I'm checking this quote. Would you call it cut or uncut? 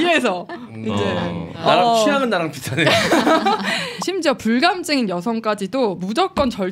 cut